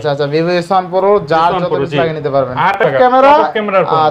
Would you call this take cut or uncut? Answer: cut